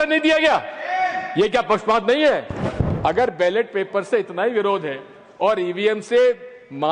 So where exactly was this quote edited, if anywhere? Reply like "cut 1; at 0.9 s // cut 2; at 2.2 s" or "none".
cut 1; at 2.9 s